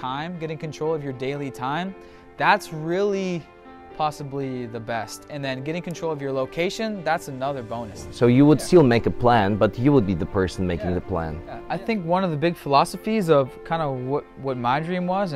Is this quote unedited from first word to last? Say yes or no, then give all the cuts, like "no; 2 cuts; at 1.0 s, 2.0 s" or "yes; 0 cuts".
no; 2 cuts; at 8.0 s, 11.6 s